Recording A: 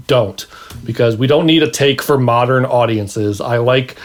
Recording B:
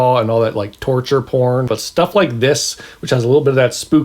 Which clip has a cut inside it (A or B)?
B